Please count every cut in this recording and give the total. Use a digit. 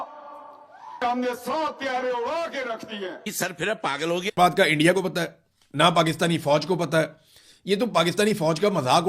1